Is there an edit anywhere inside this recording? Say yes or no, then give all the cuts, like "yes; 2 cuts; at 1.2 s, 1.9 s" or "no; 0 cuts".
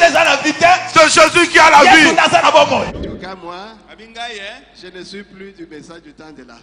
yes; 1 cut; at 2.9 s